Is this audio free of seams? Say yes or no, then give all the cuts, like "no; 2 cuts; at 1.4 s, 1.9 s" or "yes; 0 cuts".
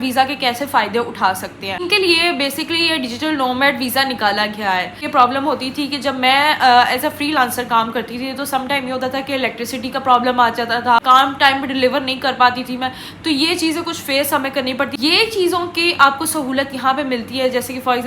no; 4 cuts; at 1.8 s, 5.0 s, 11.0 s, 15.0 s